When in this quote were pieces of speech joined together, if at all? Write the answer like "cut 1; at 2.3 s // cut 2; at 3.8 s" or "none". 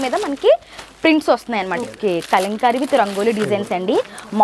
cut 1; at 1.8 s